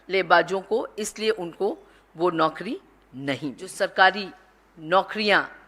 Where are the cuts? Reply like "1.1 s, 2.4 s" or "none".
3.6 s